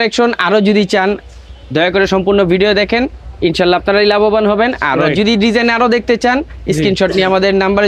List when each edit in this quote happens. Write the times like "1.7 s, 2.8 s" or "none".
none